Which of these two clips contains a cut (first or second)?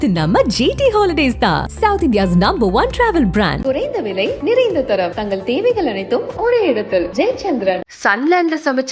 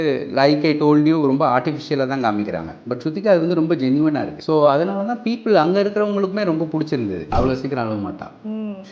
second